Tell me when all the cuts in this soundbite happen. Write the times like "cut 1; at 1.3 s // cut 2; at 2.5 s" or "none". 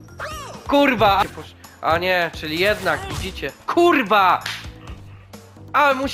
cut 1; at 1.2 s